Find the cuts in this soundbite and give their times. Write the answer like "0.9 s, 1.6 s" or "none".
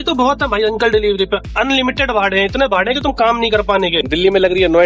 4.0 s